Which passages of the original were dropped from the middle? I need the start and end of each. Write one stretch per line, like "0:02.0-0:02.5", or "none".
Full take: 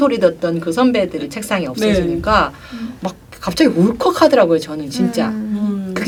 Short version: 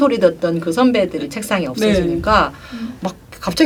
none